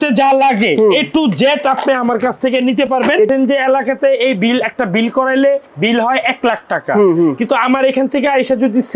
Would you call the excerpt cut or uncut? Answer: cut